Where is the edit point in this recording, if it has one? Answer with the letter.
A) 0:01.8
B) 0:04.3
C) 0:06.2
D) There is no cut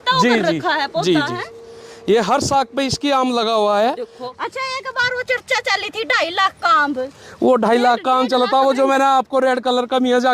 B